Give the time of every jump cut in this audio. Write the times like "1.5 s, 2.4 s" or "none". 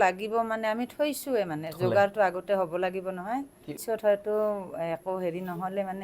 3.7 s

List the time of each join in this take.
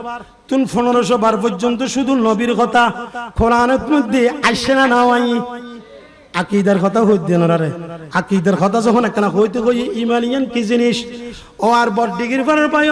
none

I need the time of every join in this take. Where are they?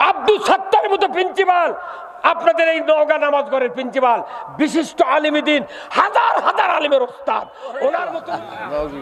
8.1 s

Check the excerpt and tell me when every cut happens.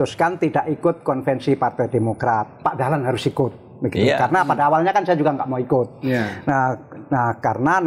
none

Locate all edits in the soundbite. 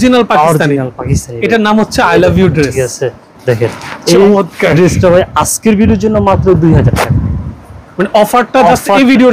none

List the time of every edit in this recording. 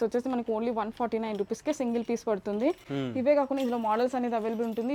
none

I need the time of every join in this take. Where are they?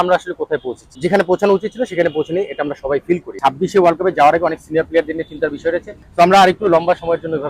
0.9 s, 3.3 s, 6.0 s

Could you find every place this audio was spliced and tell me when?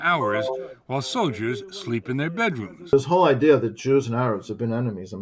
2.9 s

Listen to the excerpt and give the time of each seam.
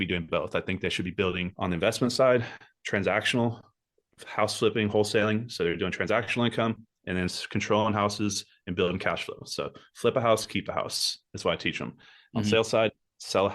1.5 s

